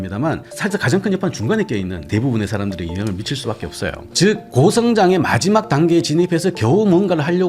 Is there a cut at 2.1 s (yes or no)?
yes